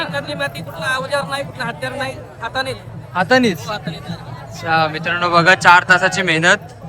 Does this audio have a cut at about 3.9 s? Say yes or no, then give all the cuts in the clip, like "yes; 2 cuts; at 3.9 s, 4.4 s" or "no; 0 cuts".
no; 0 cuts